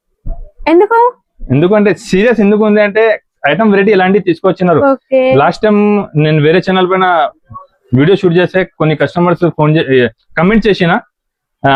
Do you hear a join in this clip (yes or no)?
no